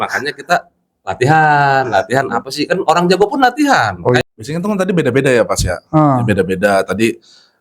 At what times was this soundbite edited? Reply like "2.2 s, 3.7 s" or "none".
4.2 s